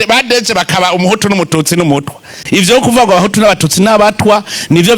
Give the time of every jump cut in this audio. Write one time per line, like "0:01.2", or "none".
0:02.4